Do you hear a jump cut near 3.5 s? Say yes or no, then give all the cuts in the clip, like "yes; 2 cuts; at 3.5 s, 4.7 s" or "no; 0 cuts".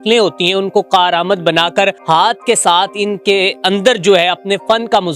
no; 1 cut; at 2.0 s